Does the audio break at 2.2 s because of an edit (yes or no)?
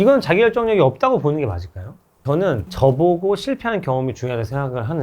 yes